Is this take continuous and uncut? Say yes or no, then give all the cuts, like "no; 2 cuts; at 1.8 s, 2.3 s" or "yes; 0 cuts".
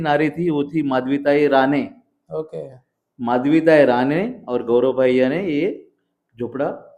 yes; 0 cuts